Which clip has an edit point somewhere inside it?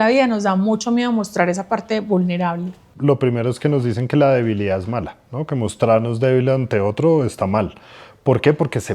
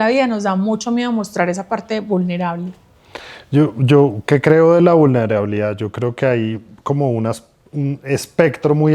first; 1 cut; at 2.9 s

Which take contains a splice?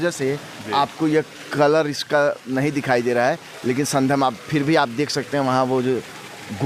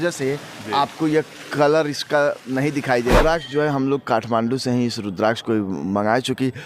second; 1 cut; at 3.2 s

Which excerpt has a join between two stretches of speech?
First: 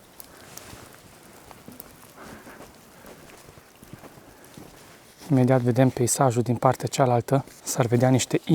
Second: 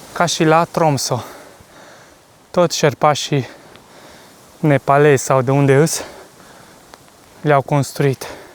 first; 2 cuts; at 5.1 s, 7.6 s

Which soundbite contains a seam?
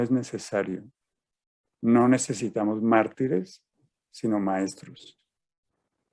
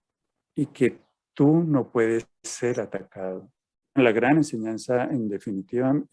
second; 1 cut; at 4.0 s

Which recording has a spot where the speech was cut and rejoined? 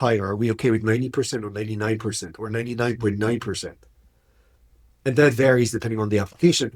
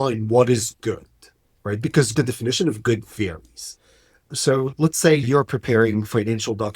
second; 2 cuts; at 2.1 s, 5.2 s

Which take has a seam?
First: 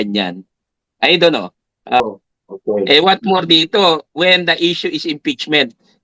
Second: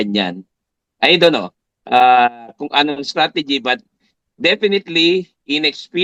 first; 1 cut; at 2.0 s

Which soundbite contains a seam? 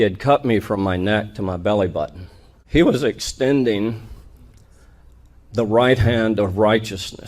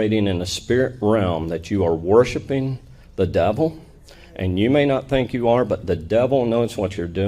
first; 1 cut; at 2.7 s

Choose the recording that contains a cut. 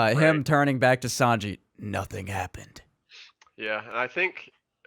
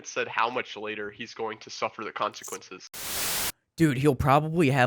second; 1 cut; at 3.0 s

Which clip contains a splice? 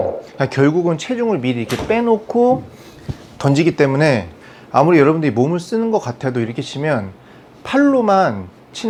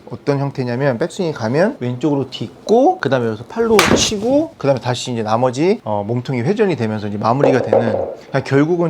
second; 4 cuts; at 1.8 s, 3.0 s, 4.5 s, 5.8 s

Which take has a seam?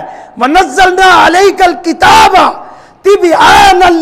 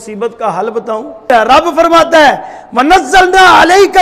second; 1 cut; at 1.2 s

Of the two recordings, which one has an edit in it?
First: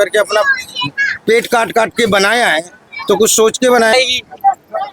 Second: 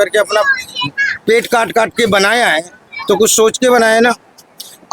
first; 1 cut; at 3.9 s

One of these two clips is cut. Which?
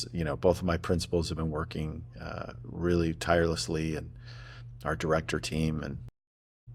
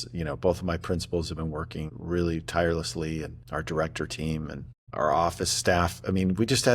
second; 3 cuts; at 1.9 s, 3.4 s, 4.9 s

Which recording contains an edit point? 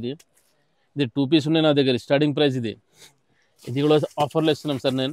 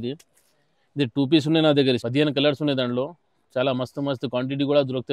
second; 1 cut; at 2.0 s

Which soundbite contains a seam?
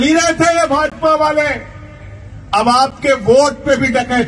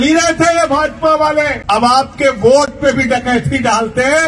second; 1 cut; at 1.6 s

